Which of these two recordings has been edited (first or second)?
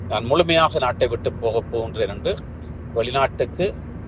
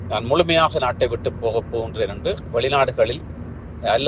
second